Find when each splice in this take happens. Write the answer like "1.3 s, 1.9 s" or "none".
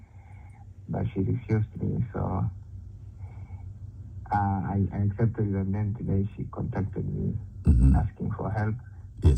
none